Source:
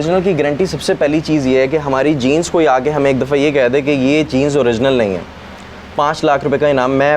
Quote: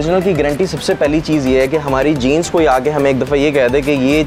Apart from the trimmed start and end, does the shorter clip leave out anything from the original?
no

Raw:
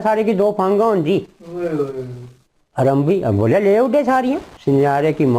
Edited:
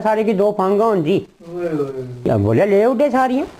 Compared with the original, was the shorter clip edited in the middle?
yes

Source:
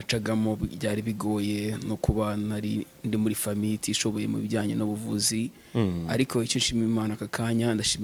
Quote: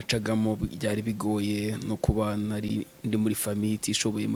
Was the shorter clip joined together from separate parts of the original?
no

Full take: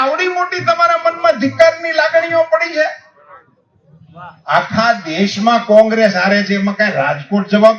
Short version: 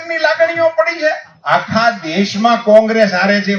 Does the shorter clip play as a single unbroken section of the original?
no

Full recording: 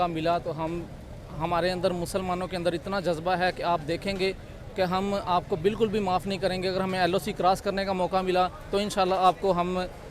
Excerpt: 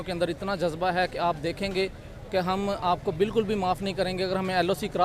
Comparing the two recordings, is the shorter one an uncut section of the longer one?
yes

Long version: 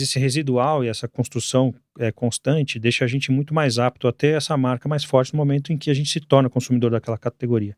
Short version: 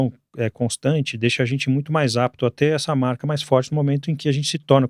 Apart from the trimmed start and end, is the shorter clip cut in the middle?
no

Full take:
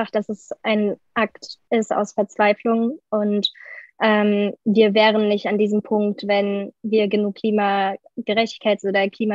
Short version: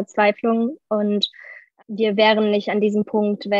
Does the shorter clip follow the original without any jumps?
no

